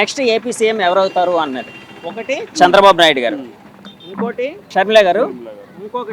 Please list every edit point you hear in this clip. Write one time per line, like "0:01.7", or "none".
0:04.7